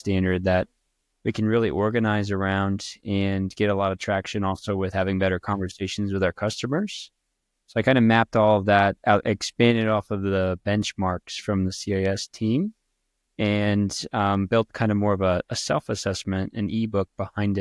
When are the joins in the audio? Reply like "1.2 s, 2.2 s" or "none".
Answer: none